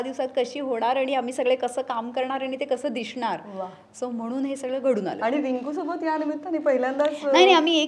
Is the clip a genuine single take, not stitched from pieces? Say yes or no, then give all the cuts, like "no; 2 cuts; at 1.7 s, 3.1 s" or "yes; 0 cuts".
yes; 0 cuts